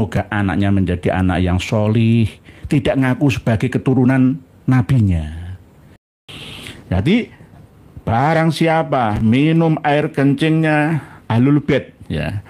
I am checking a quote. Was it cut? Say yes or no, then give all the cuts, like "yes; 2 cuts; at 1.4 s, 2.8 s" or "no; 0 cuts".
yes; 1 cut; at 6.2 s